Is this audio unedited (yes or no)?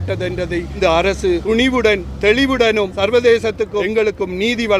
no